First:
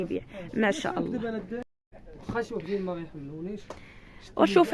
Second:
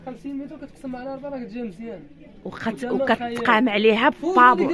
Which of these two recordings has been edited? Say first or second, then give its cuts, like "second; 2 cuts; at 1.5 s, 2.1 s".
first; 1 cut; at 1.7 s